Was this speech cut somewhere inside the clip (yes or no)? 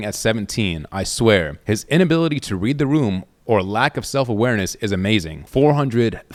no